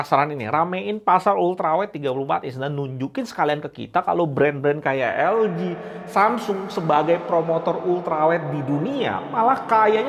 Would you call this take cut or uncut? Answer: uncut